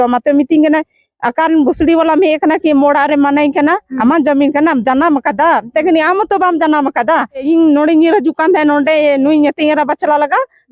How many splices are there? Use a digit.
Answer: 1